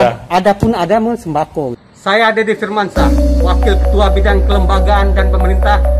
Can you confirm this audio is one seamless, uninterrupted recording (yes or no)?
no